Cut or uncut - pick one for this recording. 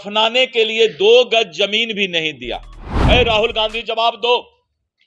cut